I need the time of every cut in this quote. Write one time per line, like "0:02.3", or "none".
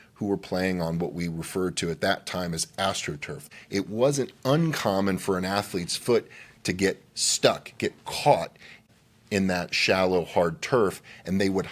0:03.5
0:08.9